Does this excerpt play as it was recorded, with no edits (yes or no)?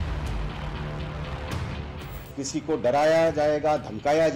no